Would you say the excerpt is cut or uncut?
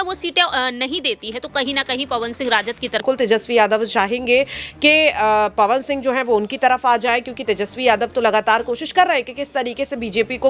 cut